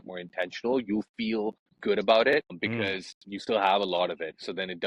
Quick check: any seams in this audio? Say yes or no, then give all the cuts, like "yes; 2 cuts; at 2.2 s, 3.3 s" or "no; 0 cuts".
yes; 2 cuts; at 1.7 s, 2.6 s